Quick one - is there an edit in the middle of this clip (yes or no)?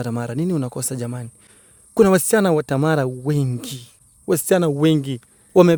no